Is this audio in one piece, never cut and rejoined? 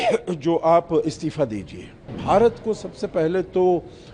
no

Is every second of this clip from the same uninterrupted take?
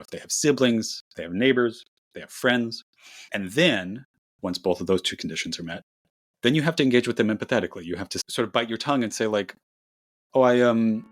no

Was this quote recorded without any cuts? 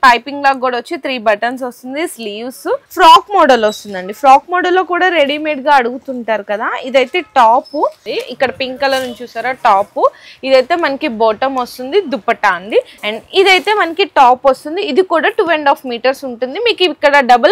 no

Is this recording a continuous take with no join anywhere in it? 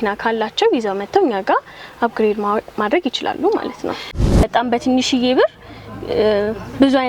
no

